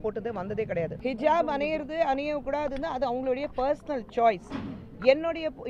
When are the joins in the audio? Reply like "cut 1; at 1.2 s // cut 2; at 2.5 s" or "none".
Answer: cut 1; at 0.9 s